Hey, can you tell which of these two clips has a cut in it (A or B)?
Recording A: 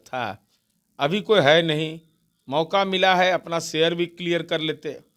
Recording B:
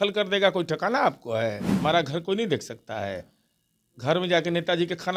B